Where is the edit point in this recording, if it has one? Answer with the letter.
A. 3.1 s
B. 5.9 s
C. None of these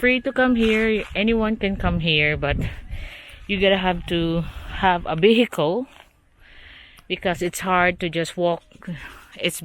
C